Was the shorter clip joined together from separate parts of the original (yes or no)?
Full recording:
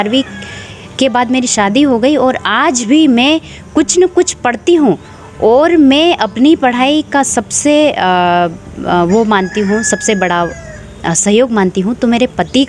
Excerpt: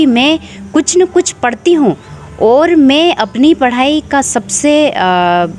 no